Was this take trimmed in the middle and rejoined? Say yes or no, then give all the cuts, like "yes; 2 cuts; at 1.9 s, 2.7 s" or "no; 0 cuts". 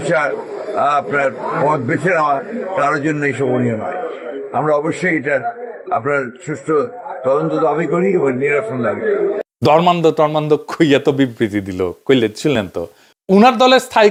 no; 0 cuts